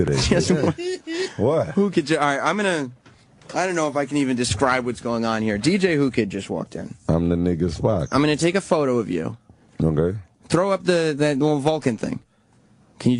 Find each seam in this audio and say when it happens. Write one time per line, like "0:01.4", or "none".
0:11.4

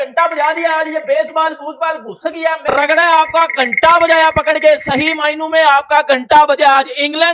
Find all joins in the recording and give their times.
0:02.6

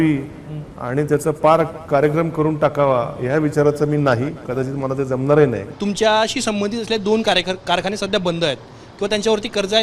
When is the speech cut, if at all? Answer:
0:05.7

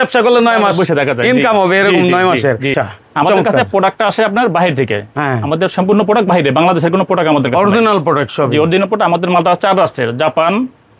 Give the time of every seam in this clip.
0:02.7

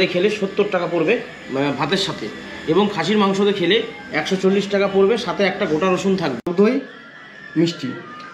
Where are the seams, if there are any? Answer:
0:06.4

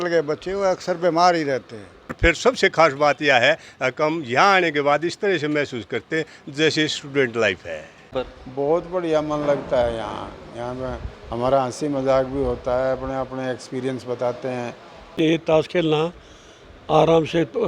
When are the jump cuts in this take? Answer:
0:02.2
0:08.1
0:15.1

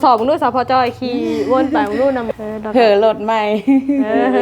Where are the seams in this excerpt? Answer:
0:02.3

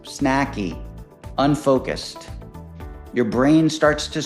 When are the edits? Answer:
none

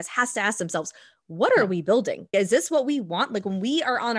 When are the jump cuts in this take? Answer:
0:02.3

